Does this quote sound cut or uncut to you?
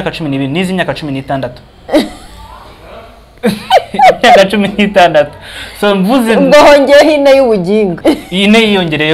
cut